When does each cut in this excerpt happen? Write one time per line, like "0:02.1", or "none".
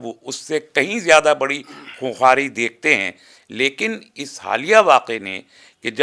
none